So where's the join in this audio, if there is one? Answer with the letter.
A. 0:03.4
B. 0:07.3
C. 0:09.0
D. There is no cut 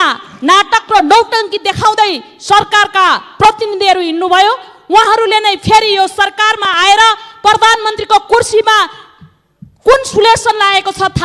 D